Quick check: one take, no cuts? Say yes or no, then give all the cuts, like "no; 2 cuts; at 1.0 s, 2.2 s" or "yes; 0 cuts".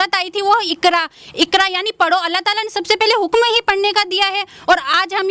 yes; 0 cuts